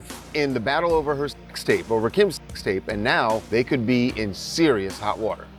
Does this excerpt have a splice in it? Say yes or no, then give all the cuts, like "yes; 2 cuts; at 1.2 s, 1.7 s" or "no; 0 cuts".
no; 0 cuts